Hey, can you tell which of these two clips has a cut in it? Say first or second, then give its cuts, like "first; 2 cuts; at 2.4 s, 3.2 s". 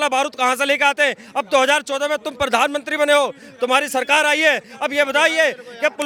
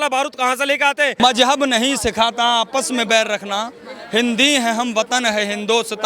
second; 1 cut; at 1.2 s